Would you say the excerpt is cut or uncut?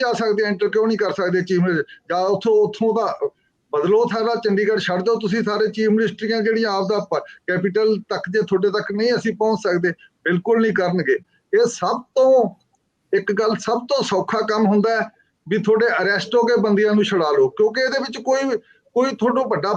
uncut